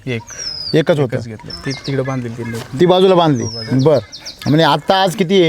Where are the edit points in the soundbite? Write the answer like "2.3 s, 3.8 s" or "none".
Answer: 1.4 s